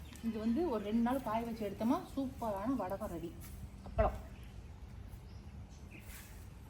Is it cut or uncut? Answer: uncut